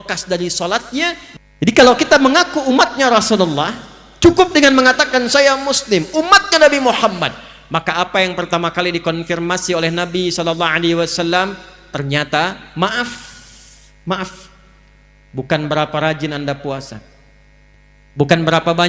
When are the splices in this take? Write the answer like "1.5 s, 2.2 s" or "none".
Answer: 1.2 s